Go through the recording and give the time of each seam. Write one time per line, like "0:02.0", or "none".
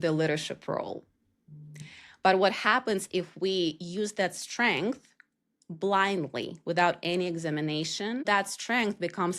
0:08.2